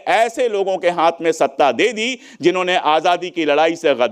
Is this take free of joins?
yes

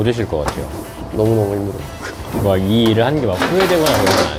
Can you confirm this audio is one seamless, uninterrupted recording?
yes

